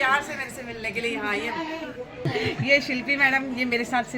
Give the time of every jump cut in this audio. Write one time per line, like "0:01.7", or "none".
0:02.3